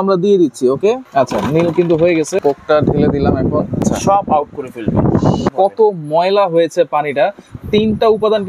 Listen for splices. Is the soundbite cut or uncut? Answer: cut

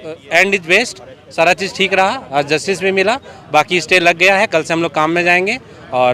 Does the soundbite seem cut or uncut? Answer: uncut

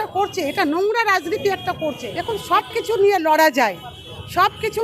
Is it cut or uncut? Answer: cut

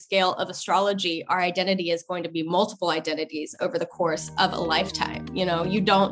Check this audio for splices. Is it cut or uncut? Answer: uncut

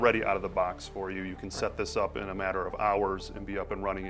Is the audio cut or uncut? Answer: uncut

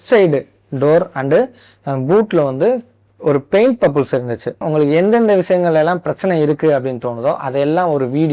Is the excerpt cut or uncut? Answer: cut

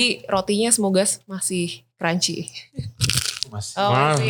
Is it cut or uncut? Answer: uncut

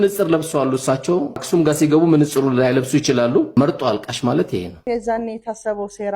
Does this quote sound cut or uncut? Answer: cut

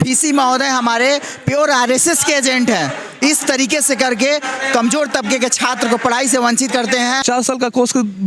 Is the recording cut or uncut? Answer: cut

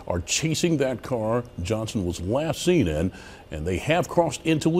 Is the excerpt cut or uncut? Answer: uncut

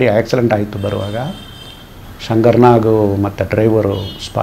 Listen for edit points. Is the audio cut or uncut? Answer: uncut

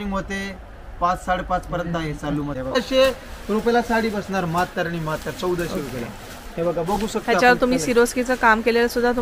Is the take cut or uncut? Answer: cut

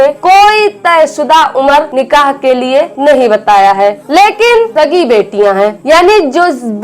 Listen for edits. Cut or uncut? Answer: cut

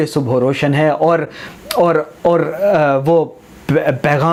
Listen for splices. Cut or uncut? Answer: uncut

